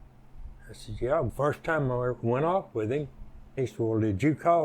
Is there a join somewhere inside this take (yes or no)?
yes